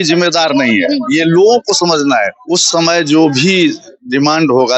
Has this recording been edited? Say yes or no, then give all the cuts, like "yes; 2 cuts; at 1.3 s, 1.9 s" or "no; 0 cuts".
yes; 1 cut; at 2.4 s